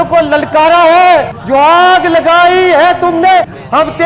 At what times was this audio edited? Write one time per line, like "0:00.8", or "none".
0:01.3